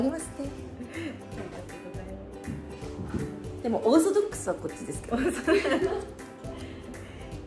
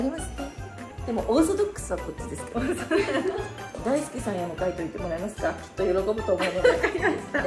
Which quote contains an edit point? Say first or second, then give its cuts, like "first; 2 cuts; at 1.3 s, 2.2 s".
second; 2 cuts; at 0.9 s, 3.8 s